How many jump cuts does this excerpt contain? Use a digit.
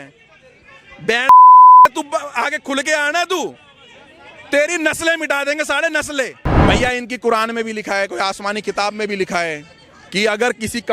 1